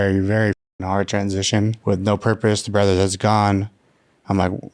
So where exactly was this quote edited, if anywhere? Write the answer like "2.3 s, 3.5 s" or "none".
1.8 s

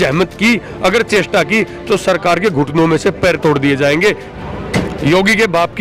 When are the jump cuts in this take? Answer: 4.3 s

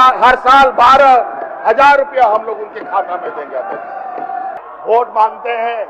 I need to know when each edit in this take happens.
4.6 s

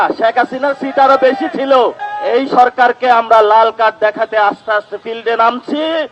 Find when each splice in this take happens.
2.1 s

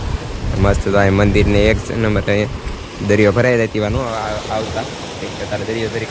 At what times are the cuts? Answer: none

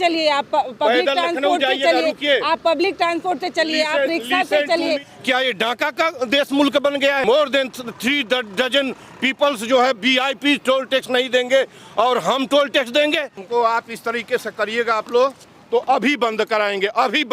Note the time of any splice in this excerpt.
5.1 s, 7.2 s, 13.4 s

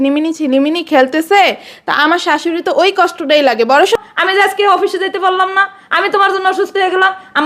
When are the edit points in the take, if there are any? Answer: 4.0 s

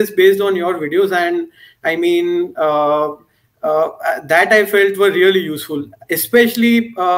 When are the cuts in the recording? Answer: none

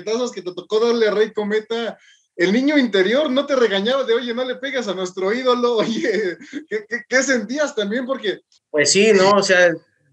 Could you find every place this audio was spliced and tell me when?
8.5 s

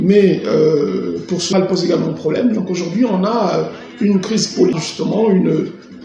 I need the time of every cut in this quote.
1.5 s, 4.8 s

